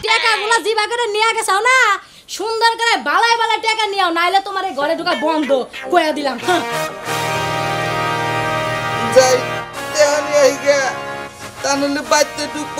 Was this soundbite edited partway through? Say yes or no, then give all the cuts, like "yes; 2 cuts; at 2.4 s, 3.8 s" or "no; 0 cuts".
no; 0 cuts